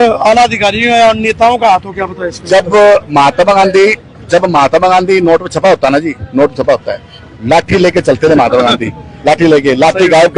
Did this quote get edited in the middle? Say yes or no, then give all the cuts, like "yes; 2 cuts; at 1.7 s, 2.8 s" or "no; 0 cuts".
no; 0 cuts